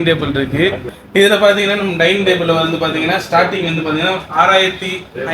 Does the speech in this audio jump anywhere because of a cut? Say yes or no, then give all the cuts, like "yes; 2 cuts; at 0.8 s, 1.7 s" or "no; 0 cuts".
yes; 1 cut; at 0.9 s